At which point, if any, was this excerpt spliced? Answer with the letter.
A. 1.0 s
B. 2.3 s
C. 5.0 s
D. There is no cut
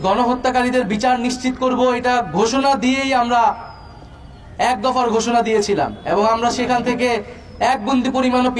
D